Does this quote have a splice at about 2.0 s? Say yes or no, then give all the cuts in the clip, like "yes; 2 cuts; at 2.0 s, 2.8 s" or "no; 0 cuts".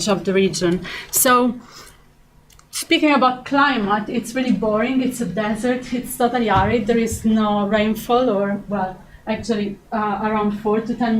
no; 1 cut; at 4.9 s